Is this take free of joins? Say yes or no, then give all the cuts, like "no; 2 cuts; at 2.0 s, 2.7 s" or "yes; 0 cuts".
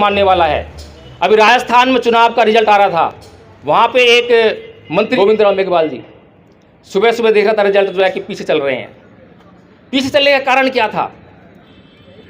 no; 1 cut; at 5.1 s